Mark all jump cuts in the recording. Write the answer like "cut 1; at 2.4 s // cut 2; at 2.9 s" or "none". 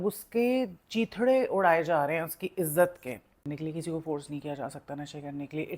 cut 1; at 3.5 s